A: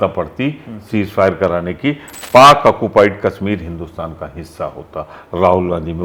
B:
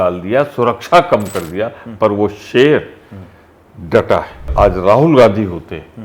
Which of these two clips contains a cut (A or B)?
B